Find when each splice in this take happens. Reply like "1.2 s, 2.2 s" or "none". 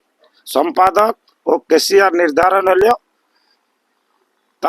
none